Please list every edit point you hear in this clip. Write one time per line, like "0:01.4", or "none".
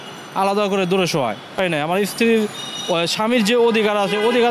0:01.6